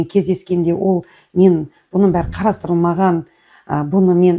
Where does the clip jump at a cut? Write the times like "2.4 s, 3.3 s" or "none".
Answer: none